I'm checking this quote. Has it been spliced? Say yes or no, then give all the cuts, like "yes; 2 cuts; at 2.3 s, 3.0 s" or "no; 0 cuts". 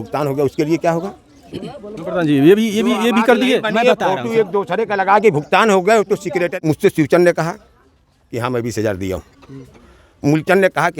yes; 1 cut; at 6.6 s